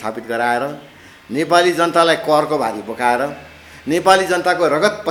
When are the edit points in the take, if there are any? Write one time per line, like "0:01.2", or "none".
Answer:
none